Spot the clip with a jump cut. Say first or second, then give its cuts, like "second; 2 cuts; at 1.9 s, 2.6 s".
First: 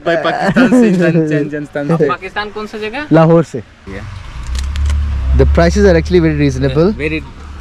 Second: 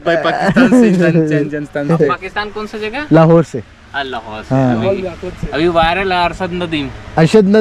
first; 1 cut; at 3.8 s